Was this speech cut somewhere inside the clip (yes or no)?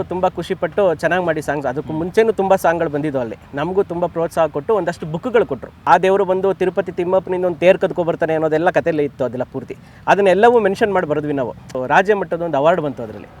yes